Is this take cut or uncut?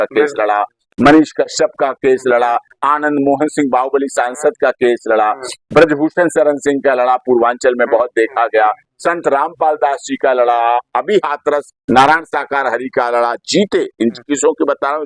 uncut